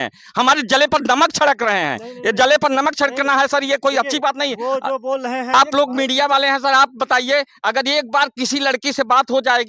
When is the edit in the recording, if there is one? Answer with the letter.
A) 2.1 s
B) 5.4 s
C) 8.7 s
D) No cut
B